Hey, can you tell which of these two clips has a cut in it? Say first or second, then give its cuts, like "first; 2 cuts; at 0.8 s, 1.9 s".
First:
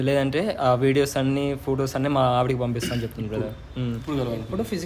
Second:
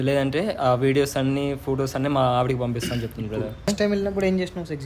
second; 1 cut; at 3.7 s